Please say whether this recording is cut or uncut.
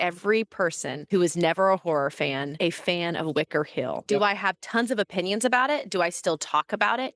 cut